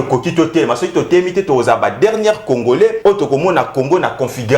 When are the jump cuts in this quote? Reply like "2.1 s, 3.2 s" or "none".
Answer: 3.0 s